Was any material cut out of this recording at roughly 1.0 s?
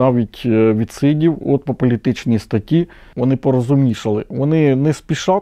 no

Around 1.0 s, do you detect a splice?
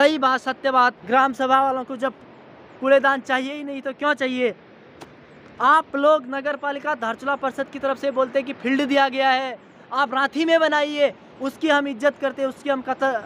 yes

